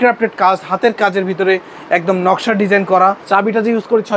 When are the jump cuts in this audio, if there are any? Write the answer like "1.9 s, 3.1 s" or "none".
3.2 s